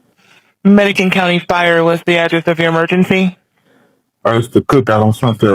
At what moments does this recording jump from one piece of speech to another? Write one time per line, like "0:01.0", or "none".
none